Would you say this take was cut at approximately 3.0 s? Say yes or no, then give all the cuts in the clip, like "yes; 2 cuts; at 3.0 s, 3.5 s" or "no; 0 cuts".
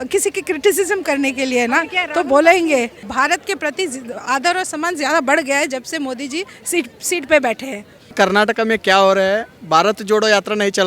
yes; 2 cuts; at 3.0 s, 8.1 s